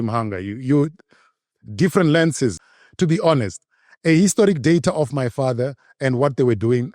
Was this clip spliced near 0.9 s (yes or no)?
no